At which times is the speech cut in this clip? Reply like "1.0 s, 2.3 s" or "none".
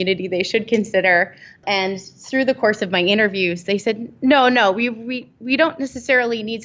none